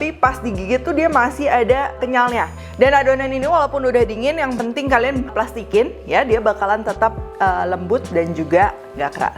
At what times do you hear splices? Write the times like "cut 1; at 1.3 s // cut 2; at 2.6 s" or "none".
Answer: cut 1; at 2.2 s // cut 2; at 5.3 s